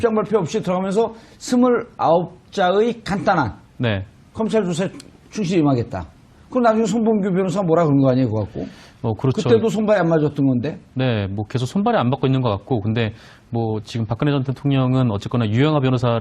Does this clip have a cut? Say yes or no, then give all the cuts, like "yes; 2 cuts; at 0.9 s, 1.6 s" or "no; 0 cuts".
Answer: yes; 1 cut; at 8.1 s